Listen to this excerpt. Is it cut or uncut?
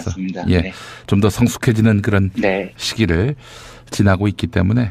uncut